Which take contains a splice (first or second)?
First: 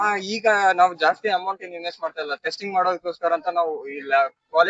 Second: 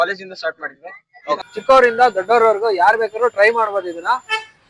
second